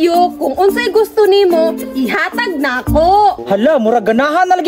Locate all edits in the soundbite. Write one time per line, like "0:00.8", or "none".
0:03.4

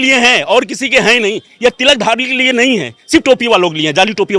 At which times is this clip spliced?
none

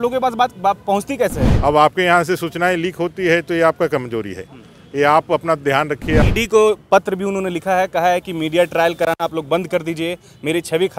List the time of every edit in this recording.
0:01.5
0:06.3

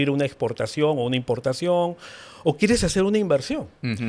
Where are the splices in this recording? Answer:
none

